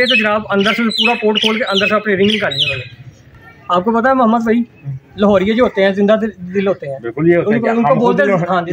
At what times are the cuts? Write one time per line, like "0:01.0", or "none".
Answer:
0:03.3